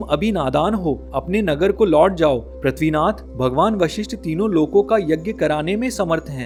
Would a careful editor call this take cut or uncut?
uncut